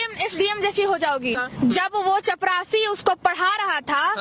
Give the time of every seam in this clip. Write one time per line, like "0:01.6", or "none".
0:01.3